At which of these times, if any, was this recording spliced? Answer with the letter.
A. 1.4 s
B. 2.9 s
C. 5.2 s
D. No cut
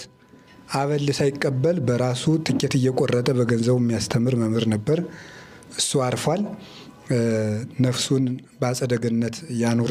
D